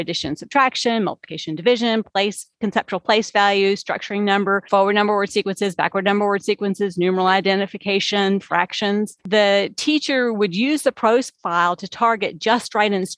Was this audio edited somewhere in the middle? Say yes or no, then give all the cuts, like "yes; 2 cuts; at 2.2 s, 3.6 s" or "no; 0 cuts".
no; 0 cuts